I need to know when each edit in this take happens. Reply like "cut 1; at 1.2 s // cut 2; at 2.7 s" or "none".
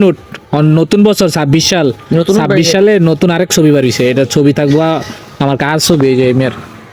none

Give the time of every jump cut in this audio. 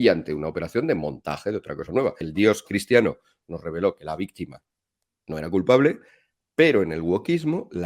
cut 1; at 2.2 s

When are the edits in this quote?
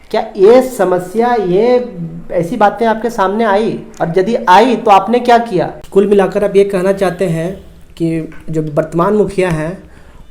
cut 1; at 5.8 s

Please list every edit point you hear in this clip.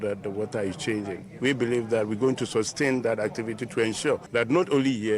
cut 1; at 4.2 s

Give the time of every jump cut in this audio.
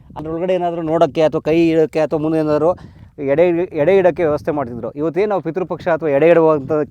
none

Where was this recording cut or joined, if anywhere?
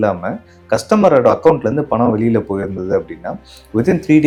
none

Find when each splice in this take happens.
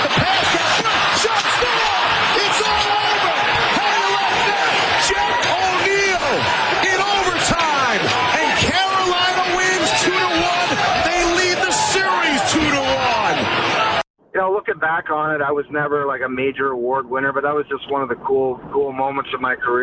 cut 1; at 14.0 s

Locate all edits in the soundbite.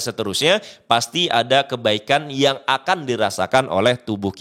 none

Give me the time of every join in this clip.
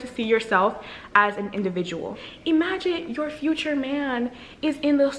cut 1; at 2.2 s

